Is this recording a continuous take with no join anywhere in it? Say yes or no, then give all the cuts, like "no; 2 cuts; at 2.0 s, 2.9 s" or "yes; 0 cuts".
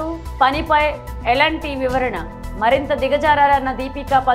yes; 0 cuts